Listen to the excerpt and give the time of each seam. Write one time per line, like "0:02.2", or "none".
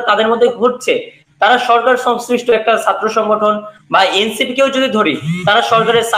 none